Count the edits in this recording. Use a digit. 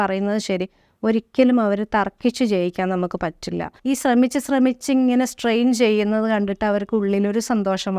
1